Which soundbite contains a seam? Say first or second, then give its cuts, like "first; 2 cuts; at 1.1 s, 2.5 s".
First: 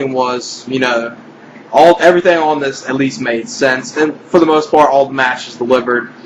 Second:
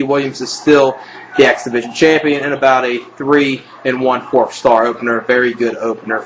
first; 1 cut; at 2.7 s